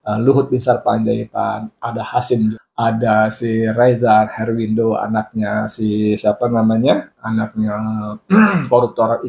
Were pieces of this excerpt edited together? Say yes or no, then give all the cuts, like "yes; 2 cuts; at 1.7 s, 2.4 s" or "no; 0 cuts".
yes; 1 cut; at 2.5 s